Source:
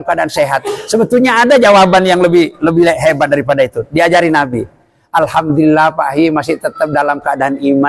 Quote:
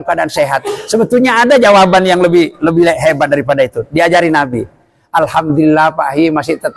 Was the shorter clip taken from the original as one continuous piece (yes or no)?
yes